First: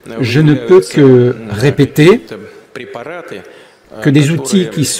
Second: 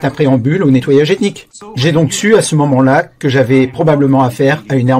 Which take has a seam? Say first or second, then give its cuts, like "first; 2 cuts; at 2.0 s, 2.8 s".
second; 1 cut; at 1.5 s